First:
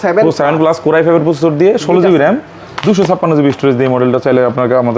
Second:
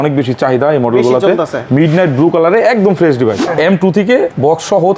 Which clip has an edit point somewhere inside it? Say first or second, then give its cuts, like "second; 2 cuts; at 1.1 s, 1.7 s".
second; 1 cut; at 3.4 s